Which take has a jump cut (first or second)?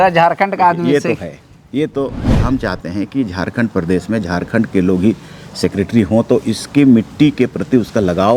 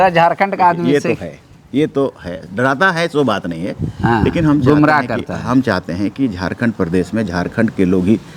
first